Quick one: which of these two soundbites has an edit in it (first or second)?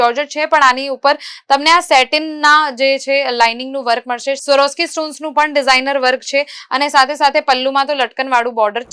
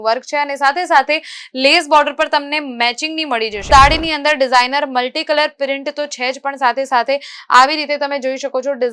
second